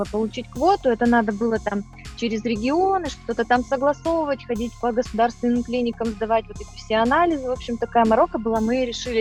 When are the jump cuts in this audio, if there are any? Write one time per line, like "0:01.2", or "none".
none